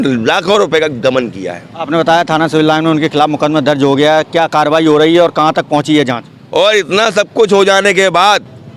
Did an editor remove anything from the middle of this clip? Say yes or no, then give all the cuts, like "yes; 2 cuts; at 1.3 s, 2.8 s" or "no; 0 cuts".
no; 0 cuts